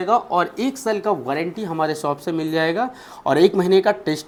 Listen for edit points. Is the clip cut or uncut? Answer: uncut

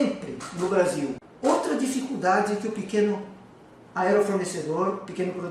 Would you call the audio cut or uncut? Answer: cut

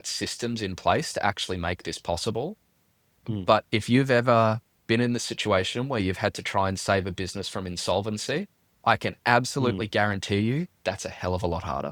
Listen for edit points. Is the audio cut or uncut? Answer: uncut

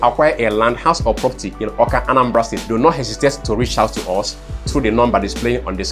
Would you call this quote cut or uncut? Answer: cut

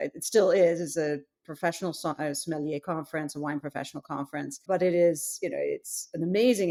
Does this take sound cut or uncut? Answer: uncut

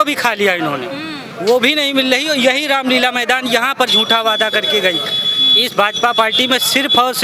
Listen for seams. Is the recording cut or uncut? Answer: uncut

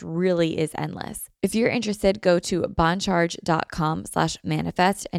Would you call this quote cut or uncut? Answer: cut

